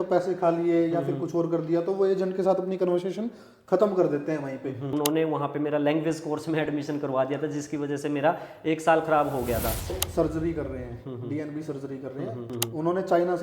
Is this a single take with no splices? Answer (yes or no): no